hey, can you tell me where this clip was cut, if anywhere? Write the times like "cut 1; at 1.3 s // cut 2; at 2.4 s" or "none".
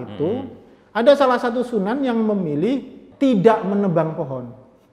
cut 1; at 3.0 s